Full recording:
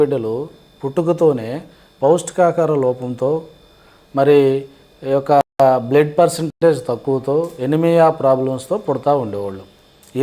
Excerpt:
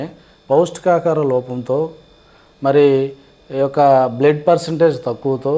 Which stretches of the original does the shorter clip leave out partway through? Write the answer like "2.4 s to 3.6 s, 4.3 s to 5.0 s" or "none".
5.4 s to 5.6 s, 6.4 s to 6.5 s